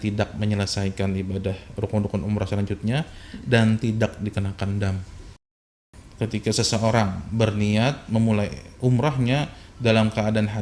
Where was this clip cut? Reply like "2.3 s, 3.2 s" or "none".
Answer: 5.7 s